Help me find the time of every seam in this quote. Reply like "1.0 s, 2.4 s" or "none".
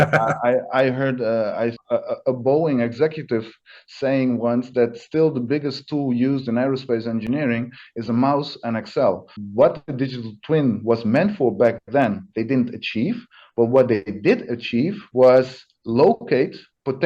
1.8 s, 9.4 s